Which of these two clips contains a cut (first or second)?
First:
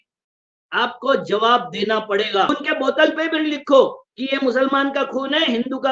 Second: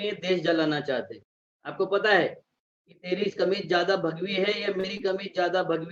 first